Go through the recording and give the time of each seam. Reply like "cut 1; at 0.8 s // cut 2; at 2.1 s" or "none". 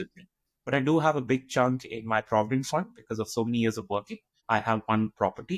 cut 1; at 4.4 s